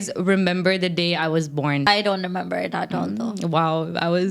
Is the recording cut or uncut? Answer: cut